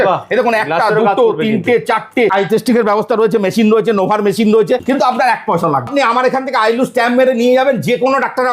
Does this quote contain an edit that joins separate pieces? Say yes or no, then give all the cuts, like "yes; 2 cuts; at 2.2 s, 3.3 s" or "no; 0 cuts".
yes; 3 cuts; at 2.3 s, 4.8 s, 5.9 s